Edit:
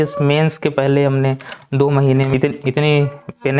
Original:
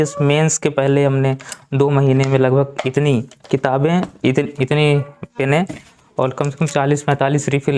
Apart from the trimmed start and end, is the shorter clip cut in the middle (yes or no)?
yes